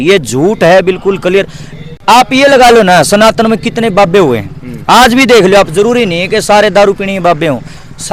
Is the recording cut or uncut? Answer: uncut